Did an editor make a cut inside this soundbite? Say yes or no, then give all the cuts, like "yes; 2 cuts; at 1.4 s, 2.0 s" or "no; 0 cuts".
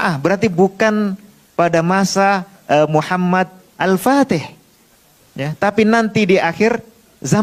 no; 0 cuts